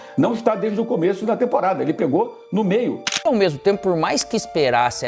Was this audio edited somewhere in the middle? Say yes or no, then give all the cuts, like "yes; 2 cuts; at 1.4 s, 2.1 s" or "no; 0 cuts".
yes; 1 cut; at 3.2 s